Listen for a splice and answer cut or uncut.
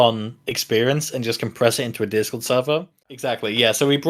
cut